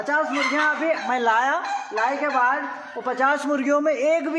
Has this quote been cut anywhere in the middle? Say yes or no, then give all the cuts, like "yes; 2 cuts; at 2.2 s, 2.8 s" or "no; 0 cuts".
no; 0 cuts